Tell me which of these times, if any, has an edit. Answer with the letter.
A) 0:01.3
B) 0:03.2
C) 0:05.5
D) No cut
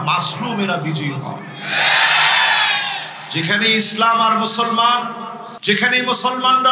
C